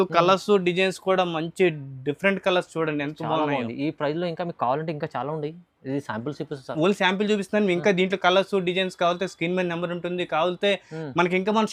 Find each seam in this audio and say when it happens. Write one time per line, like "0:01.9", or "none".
none